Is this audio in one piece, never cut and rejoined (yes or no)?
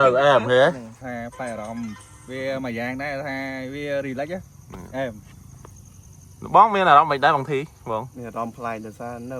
no